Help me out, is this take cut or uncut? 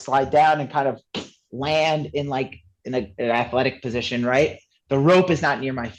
uncut